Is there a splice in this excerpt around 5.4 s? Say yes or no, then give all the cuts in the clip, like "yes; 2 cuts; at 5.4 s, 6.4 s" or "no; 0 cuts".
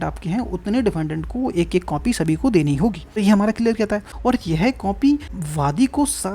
yes; 3 cuts; at 3.1 s, 4.1 s, 5.4 s